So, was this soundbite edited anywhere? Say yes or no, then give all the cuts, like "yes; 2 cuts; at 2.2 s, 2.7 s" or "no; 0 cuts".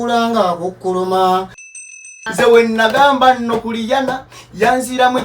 yes; 1 cut; at 2.0 s